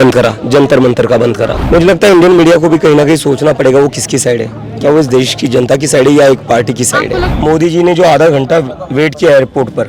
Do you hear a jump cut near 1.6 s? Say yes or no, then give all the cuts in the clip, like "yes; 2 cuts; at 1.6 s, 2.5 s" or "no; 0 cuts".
yes; 2 cuts; at 1.6 s, 7.3 s